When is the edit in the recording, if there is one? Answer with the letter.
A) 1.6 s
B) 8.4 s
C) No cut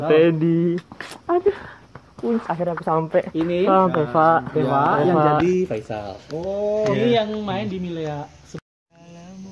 C